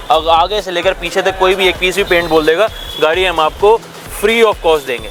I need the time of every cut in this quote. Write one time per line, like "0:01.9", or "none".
none